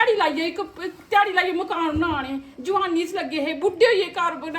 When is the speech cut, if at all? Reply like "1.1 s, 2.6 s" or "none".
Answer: none